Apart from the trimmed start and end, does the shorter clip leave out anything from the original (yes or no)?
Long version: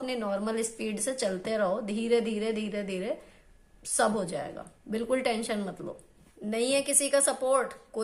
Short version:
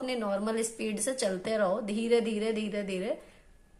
no